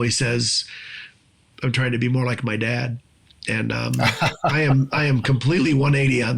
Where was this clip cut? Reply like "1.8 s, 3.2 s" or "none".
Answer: 1.5 s